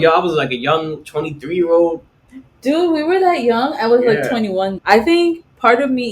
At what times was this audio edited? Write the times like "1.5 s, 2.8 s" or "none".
4.8 s